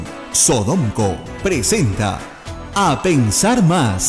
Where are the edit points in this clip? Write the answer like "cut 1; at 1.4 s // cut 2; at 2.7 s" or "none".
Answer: none